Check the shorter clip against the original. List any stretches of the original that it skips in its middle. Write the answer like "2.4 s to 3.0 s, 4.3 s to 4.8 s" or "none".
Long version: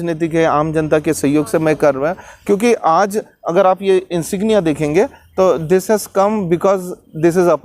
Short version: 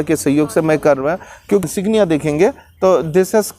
2.6 s to 4.2 s